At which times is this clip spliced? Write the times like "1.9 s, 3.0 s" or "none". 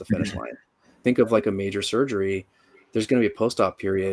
1.0 s